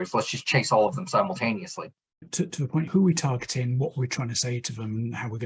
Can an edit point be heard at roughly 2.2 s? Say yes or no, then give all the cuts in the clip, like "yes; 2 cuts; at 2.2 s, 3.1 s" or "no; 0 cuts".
yes; 1 cut; at 2.2 s